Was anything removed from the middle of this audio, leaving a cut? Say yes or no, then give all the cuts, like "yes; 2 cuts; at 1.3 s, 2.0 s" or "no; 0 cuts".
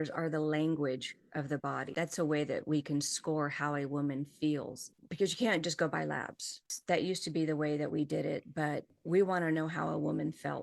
yes; 1 cut; at 1.9 s